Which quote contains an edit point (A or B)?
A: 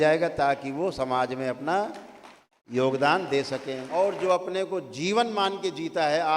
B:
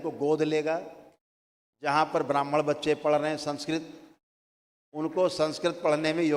A